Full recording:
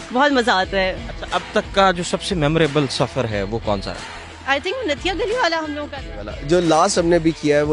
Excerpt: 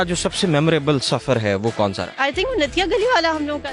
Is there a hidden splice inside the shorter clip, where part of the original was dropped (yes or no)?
yes